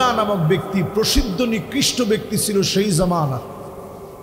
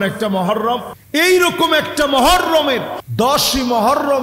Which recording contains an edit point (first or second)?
second